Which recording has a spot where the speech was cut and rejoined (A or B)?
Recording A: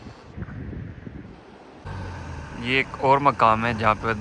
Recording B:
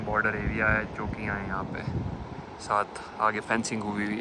A